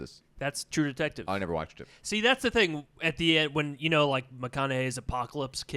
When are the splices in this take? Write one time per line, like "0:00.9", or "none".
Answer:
none